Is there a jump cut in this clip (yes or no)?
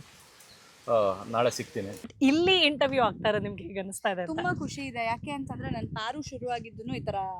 yes